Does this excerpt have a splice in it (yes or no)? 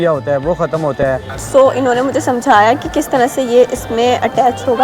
yes